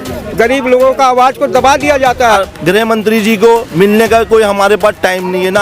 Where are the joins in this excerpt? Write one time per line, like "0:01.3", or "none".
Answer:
0:02.4